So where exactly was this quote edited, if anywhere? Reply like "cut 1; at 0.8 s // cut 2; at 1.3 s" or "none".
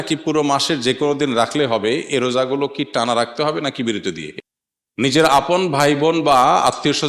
cut 1; at 4.3 s